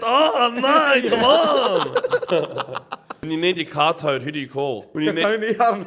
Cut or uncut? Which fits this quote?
cut